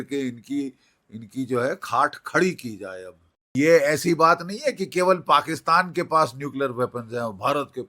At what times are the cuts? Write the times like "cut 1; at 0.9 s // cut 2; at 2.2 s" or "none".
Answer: cut 1; at 3.5 s